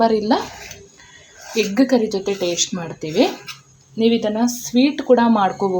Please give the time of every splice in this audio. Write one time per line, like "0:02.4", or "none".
none